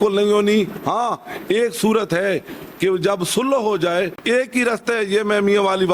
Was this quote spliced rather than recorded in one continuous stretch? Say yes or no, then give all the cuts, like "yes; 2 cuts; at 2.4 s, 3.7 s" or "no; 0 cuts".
yes; 1 cut; at 4.2 s